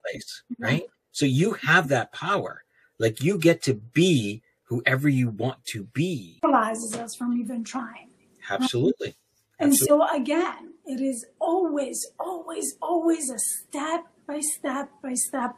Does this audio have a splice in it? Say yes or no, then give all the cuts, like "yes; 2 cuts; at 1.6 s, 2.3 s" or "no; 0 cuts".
yes; 1 cut; at 6.4 s